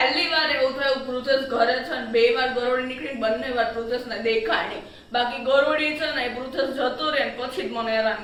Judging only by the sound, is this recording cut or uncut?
uncut